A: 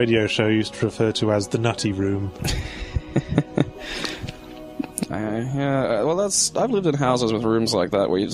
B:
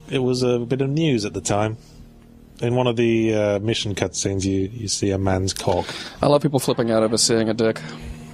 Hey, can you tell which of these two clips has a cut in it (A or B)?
B